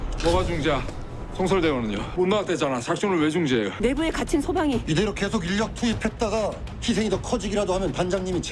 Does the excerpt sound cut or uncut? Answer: cut